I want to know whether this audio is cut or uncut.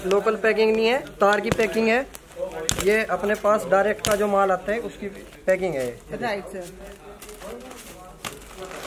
uncut